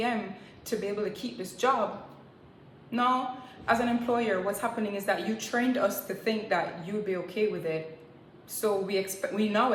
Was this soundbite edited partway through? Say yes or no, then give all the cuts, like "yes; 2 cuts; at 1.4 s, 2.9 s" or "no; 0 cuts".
no; 0 cuts